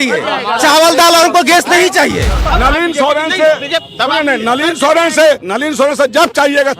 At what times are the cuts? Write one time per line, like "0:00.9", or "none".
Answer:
0:02.4
0:05.5